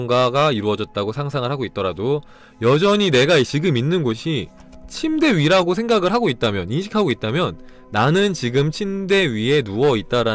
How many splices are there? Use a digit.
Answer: 0